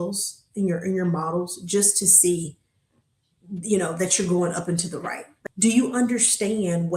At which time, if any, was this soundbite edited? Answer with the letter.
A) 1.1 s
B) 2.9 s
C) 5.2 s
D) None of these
C